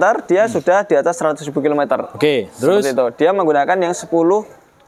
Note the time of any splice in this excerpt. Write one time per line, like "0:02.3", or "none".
none